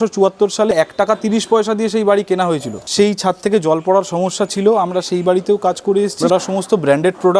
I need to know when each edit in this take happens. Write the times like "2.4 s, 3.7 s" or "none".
0.7 s, 2.8 s, 6.3 s